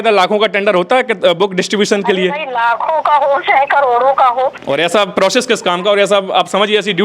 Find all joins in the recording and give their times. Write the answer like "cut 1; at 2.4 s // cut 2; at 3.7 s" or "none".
cut 1; at 4.6 s